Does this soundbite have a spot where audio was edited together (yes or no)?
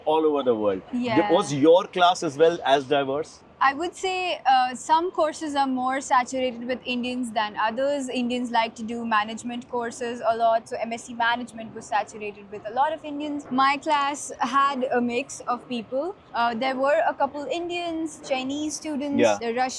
no